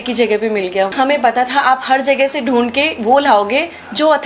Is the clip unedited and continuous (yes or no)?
no